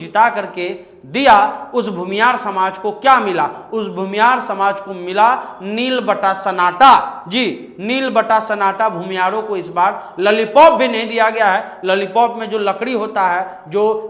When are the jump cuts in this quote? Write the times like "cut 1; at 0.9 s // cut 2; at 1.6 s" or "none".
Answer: none